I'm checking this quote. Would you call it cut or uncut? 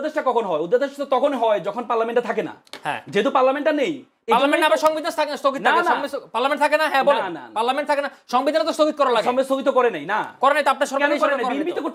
uncut